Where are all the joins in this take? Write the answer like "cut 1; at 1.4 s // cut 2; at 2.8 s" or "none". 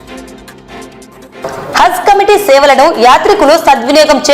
cut 1; at 1.0 s